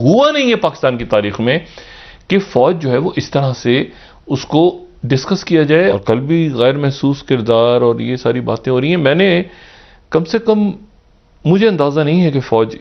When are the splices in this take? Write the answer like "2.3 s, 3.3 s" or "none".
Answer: 6.0 s